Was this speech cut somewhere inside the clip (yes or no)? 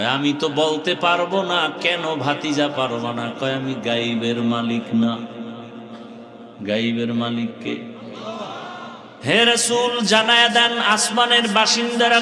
yes